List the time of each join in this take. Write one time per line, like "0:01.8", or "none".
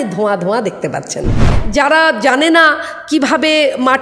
0:01.5